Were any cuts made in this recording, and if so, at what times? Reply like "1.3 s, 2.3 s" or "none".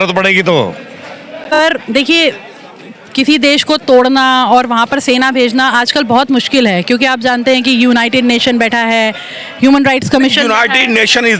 1.5 s